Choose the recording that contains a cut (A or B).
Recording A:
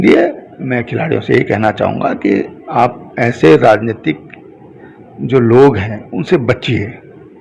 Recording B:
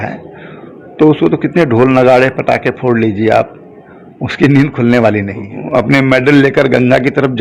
B